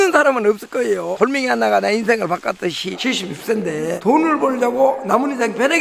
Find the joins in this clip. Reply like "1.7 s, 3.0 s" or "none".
1.1 s, 3.0 s